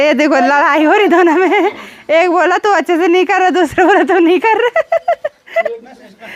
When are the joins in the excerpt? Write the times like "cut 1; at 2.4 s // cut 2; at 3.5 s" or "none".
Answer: none